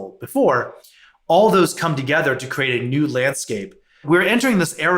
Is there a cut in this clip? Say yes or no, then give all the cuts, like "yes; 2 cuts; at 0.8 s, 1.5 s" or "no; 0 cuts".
yes; 1 cut; at 4.0 s